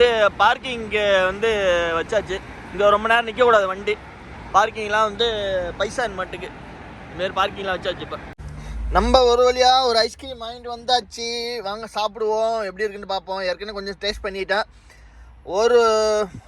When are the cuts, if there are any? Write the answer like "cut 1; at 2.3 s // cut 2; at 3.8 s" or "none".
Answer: none